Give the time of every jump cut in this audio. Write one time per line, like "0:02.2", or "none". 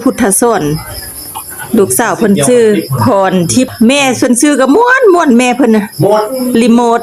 0:03.7